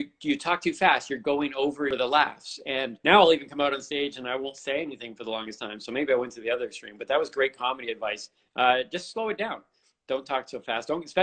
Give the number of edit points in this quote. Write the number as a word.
two